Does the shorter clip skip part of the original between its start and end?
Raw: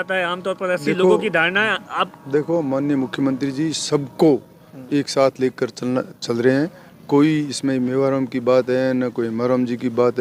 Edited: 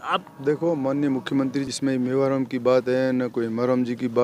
yes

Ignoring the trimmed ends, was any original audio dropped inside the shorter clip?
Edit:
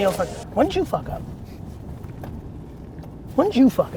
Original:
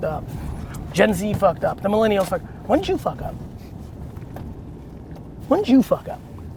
no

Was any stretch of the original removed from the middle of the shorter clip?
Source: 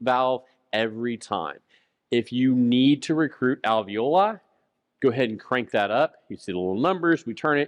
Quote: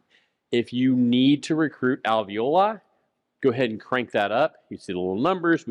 no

